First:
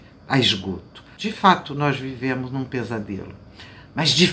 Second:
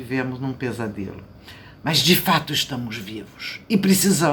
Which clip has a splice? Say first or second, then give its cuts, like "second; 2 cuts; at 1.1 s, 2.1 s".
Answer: first; 1 cut; at 1.1 s